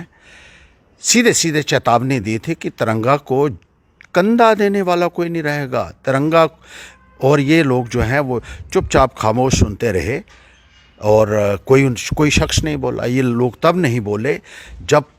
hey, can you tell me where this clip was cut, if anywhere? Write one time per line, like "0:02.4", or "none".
none